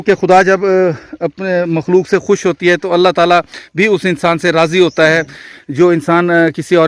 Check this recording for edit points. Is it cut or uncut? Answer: uncut